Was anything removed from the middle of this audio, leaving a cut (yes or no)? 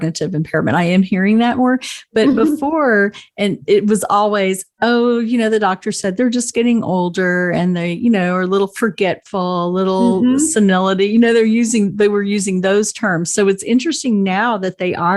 no